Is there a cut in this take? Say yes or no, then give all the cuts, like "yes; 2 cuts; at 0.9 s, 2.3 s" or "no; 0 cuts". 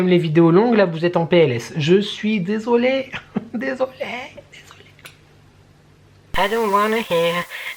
yes; 1 cut; at 6.3 s